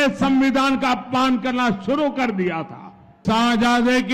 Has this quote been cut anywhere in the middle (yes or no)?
yes